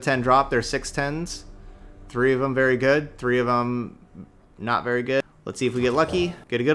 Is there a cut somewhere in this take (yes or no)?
yes